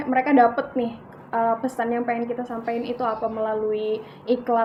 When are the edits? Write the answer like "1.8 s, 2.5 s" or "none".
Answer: none

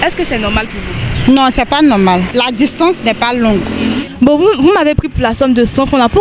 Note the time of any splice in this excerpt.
2.3 s, 4.0 s

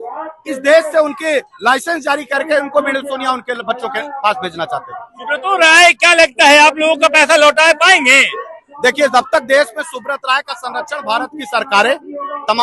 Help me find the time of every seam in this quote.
none

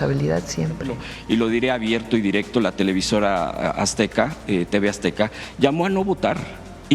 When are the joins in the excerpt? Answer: 1.1 s

